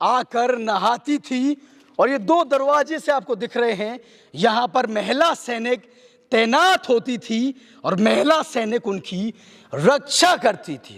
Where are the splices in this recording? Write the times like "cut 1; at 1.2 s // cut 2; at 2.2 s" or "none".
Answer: none